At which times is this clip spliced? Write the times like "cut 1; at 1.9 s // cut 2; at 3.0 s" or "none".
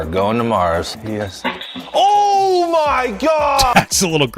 cut 1; at 1.0 s